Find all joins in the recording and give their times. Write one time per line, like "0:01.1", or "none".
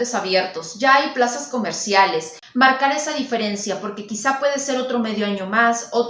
0:02.4